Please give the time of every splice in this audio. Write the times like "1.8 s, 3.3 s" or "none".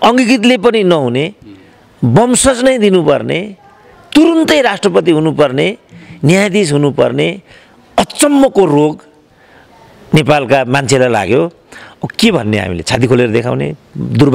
none

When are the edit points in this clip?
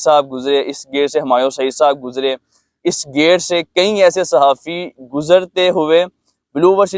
none

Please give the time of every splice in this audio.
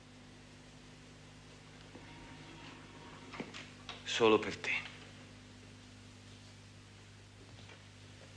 1.0 s

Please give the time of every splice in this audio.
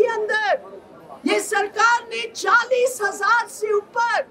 none

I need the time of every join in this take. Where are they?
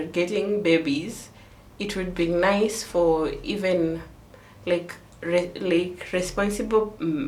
none

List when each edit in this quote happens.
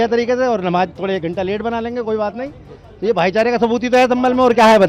none

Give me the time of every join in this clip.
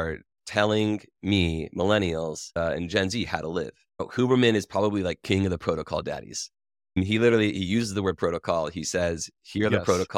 7.0 s

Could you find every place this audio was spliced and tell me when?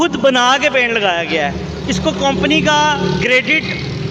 none

